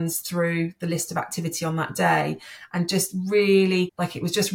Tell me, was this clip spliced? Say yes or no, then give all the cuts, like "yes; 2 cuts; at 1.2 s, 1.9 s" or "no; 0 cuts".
no; 0 cuts